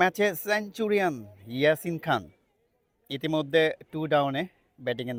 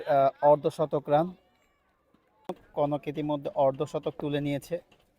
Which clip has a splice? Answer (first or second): second